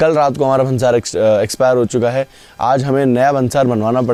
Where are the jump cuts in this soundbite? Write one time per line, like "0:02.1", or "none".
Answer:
none